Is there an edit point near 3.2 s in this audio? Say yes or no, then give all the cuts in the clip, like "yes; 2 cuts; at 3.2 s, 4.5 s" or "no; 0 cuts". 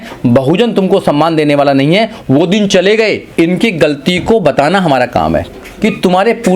yes; 1 cut; at 3.2 s